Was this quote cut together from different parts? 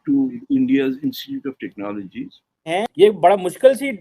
yes; 1 cut; at 2.7 s

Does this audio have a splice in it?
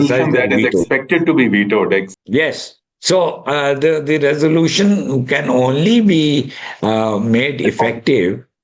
no; 0 cuts

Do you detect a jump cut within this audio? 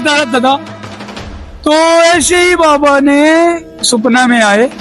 no; 0 cuts

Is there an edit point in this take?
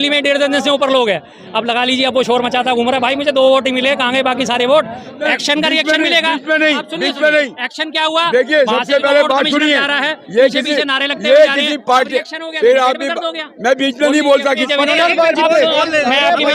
yes; 2 cuts; at 5.2 s, 14.6 s

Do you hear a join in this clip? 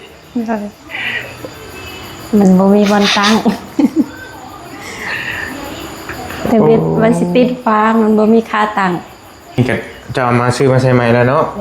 yes; 1 cut; at 9.6 s

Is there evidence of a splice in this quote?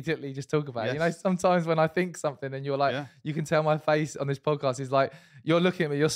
no; 0 cuts

